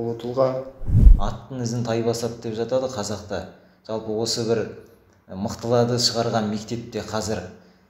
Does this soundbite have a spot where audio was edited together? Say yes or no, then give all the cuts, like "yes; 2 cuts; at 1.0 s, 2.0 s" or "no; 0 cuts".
yes; 1 cut; at 1.0 s